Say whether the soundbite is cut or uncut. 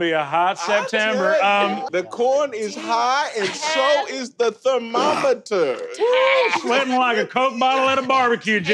cut